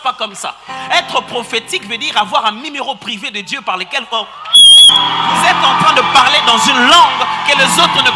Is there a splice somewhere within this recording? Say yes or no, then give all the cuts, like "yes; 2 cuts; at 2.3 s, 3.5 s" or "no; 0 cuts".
no; 0 cuts